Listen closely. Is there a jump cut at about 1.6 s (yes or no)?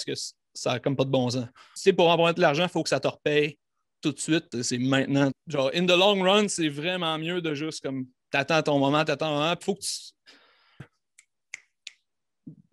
yes